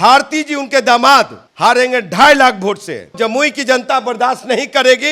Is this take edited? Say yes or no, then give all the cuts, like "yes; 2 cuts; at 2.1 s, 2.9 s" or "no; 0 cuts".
yes; 2 cuts; at 1.4 s, 3.1 s